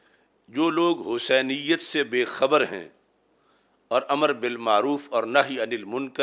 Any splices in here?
no; 0 cuts

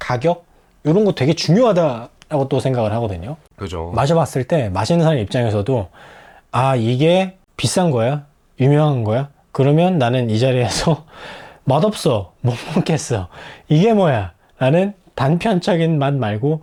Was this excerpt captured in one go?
yes; 0 cuts

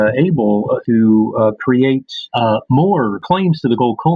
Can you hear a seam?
yes; 3 cuts; at 0.8 s, 2.2 s, 3.2 s

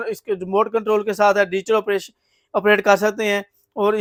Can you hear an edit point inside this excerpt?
no; 0 cuts

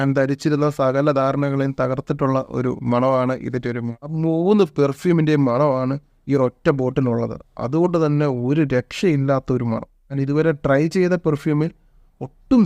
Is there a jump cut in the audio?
yes; 2 cuts; at 4.2 s, 10.2 s

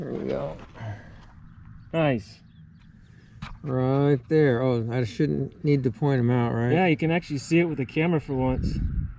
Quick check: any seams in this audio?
no; 0 cuts

